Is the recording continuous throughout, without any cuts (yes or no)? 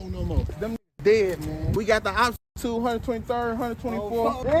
yes